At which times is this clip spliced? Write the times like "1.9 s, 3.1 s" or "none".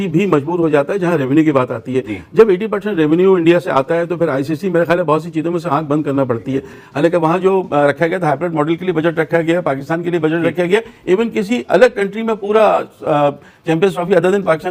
none